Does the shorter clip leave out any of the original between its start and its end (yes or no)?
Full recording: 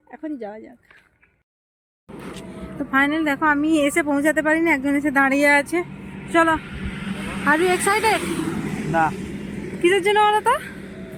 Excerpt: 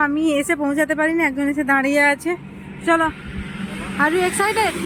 no